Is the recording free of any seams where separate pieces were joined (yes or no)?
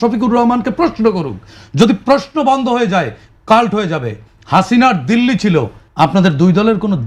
no